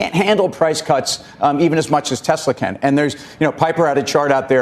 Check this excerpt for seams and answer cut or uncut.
uncut